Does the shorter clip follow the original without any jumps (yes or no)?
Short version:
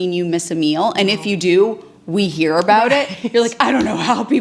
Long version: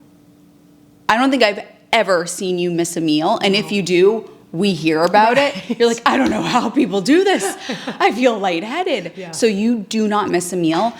yes